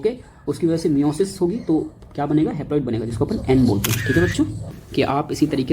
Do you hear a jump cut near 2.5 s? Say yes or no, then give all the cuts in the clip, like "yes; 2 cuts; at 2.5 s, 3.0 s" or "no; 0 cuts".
no; 1 cut; at 4.8 s